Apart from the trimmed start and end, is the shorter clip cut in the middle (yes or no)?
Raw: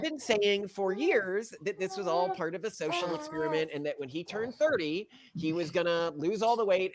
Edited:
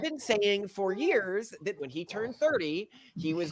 yes